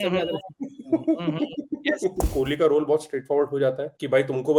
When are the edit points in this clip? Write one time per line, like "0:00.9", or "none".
0:02.3

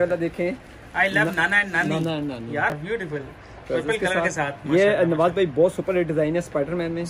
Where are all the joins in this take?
0:02.7

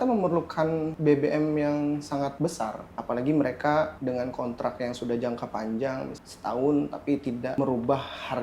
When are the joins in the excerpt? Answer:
0:00.9
0:02.5
0:04.0
0:06.2
0:07.6

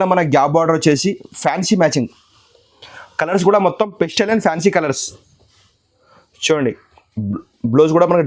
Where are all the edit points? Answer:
none

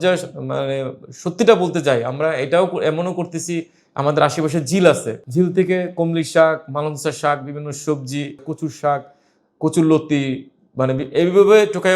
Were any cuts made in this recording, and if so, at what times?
0:05.2
0:08.5

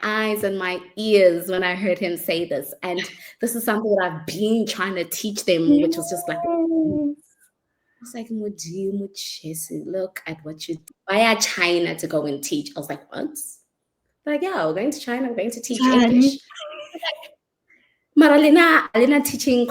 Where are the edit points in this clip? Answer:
0:10.9

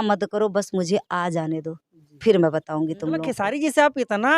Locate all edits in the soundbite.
0:03.3

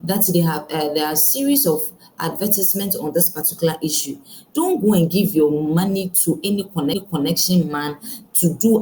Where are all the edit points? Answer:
none

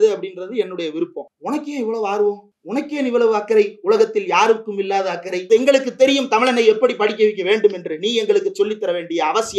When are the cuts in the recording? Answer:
0:01.3
0:02.5
0:05.4

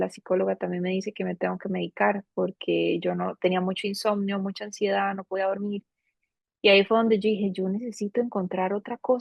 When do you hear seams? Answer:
none

